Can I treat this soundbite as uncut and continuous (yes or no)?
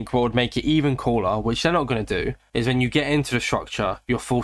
yes